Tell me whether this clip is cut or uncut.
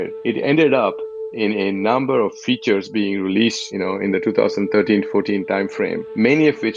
uncut